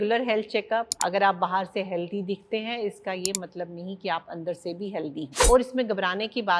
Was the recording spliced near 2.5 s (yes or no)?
no